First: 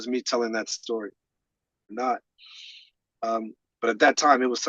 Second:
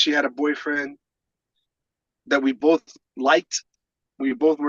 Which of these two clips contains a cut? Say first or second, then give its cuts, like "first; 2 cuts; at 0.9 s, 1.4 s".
first; 1 cut; at 1.9 s